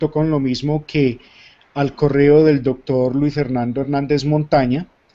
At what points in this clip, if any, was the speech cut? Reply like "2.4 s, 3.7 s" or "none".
none